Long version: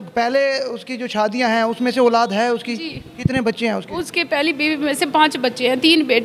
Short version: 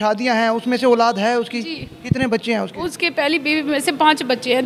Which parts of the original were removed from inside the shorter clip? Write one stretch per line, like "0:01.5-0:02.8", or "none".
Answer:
none

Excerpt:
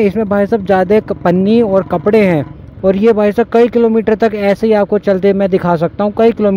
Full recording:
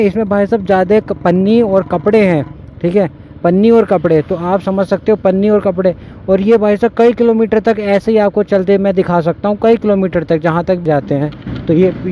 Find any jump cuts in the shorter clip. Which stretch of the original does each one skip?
0:02.6-0:06.1

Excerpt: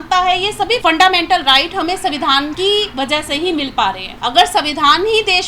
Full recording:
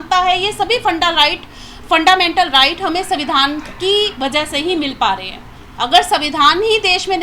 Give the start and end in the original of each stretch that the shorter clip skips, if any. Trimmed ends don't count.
0:00.8-0:01.9
0:03.6-0:03.8
0:05.3-0:05.7

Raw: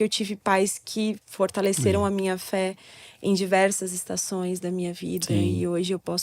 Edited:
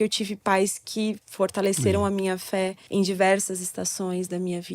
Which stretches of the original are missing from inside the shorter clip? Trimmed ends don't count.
0:02.8-0:03.1

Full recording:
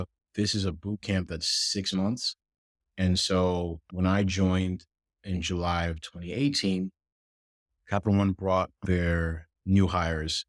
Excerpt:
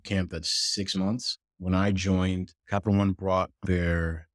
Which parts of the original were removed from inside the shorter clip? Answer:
0:02.5-0:03.8
0:04.9-0:07.7

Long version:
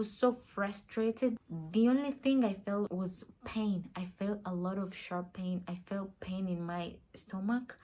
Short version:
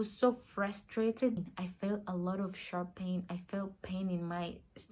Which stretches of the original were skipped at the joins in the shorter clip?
0:01.5-0:03.9

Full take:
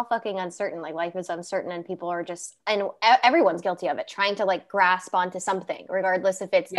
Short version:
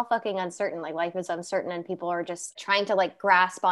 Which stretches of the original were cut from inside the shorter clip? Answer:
0:02.5-0:04.0

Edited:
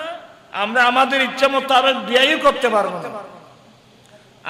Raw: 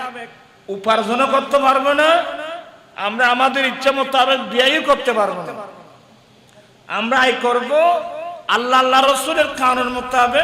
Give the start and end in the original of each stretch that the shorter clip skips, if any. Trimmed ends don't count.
none

